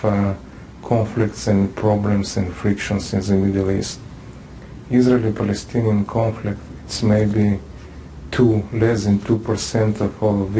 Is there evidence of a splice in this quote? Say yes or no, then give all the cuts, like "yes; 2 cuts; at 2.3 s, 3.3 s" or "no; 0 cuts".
yes; 1 cut; at 2.2 s